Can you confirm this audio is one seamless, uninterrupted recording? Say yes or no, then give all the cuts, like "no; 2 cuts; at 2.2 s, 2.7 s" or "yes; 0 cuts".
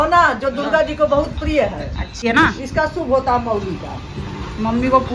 no; 1 cut; at 2.2 s